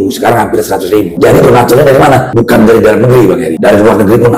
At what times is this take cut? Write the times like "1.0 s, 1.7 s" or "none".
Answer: 1.1 s, 2.3 s, 3.5 s